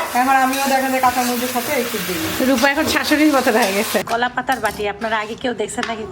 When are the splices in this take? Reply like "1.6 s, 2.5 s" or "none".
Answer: 4.1 s